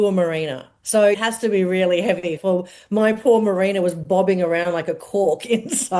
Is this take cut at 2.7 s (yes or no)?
no